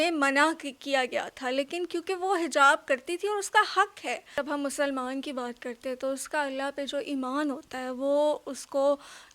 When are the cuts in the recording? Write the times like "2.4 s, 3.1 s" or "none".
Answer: 4.3 s